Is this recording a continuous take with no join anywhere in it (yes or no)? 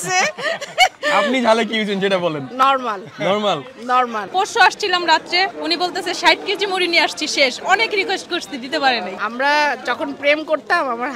no